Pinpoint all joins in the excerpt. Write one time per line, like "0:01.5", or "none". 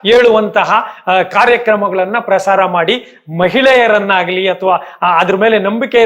none